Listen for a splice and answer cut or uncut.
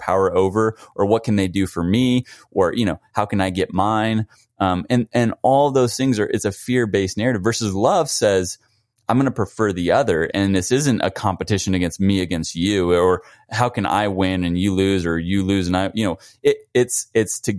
uncut